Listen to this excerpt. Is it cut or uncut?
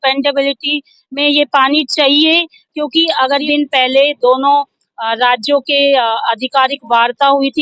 cut